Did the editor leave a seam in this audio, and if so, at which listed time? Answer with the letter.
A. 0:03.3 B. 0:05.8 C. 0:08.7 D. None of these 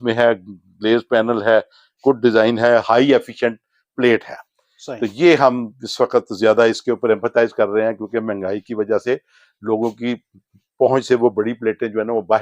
D